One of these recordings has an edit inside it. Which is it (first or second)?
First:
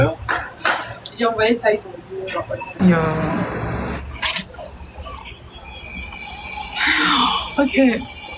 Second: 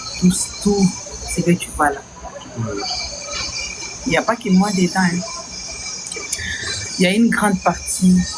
first